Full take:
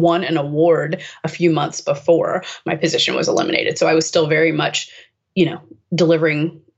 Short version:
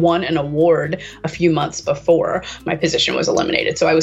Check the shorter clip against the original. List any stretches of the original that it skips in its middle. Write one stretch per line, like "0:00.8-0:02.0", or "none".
none